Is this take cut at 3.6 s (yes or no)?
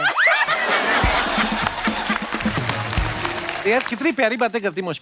yes